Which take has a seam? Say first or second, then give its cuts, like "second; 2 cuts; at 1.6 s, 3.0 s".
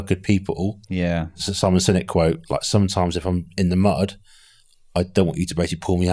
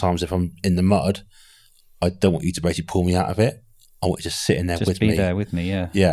first; 1 cut; at 1.4 s